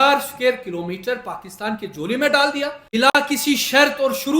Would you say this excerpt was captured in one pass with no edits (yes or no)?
no